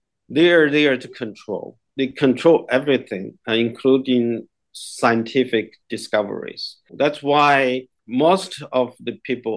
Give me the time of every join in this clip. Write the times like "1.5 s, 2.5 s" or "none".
6.9 s, 7.9 s

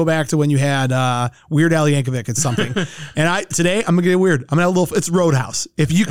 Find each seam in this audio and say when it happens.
none

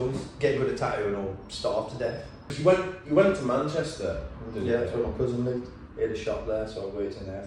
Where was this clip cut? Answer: 2.6 s

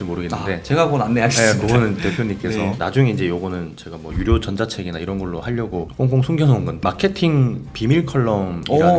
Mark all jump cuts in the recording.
none

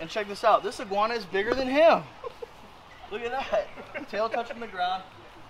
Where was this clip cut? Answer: none

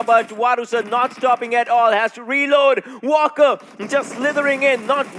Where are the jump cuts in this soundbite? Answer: none

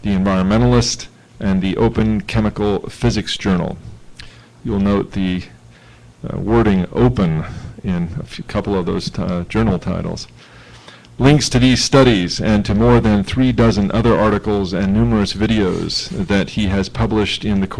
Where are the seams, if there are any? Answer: 13.0 s

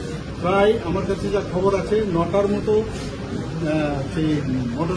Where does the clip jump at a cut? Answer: none

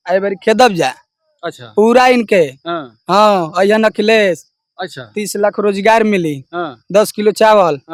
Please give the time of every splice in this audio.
none

